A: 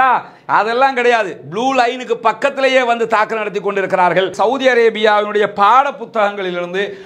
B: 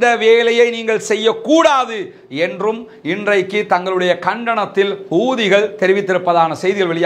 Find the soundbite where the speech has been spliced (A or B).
A